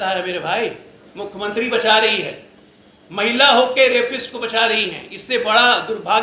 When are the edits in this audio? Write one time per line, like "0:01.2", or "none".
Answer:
none